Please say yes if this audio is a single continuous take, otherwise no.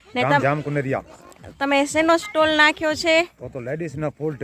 yes